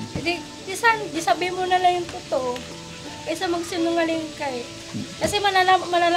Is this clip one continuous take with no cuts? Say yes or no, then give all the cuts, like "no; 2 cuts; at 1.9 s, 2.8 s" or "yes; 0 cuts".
yes; 0 cuts